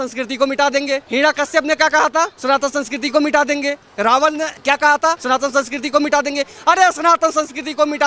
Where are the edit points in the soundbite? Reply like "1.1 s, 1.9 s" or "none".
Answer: 1.0 s, 2.4 s, 5.2 s